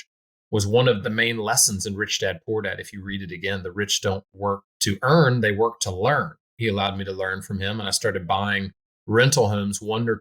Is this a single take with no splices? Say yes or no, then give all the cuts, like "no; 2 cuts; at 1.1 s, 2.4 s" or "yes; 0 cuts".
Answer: no; 3 cuts; at 1.0 s, 4.7 s, 6.4 s